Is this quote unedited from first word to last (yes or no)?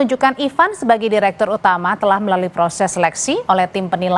yes